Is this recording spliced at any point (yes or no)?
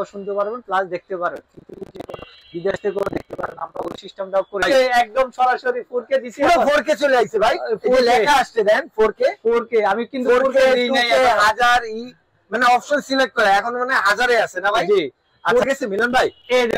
yes